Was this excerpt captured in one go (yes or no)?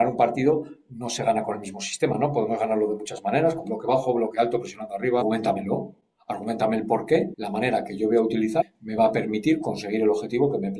no